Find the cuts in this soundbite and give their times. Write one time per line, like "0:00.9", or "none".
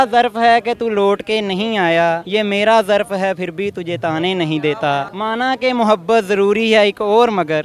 0:02.2
0:05.1

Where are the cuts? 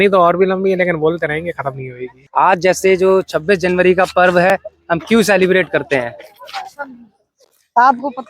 0:02.2

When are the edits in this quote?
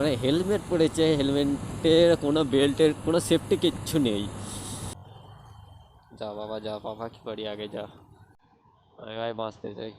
0:04.9

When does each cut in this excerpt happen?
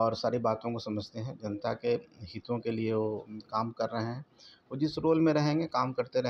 none

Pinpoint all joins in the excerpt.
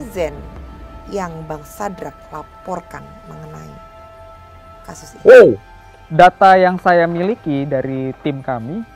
none

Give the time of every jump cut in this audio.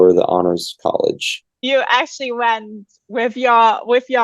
0:01.6

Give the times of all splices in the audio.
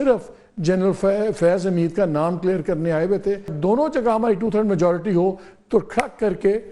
0:03.5

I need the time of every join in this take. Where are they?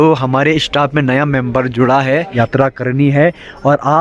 0:02.3

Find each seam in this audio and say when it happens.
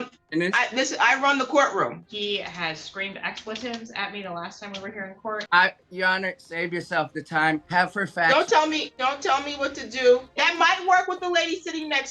0:02.1
0:05.4
0:07.6
0:08.9
0:10.3

